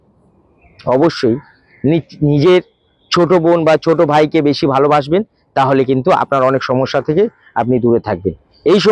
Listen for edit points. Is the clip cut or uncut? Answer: uncut